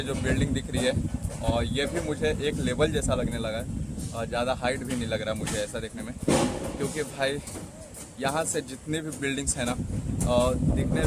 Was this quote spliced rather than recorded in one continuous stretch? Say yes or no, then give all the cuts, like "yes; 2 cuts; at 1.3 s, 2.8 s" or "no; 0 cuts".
no; 0 cuts